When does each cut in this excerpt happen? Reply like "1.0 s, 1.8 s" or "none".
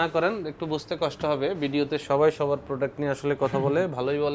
none